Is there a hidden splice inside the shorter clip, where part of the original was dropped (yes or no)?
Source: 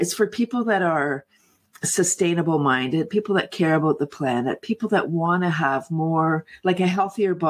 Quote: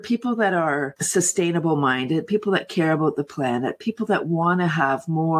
yes